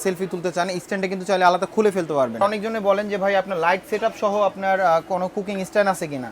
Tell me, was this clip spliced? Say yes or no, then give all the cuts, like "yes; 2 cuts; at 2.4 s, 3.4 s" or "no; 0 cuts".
yes; 1 cut; at 2.4 s